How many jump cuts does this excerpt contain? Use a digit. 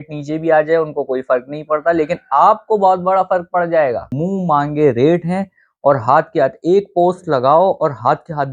1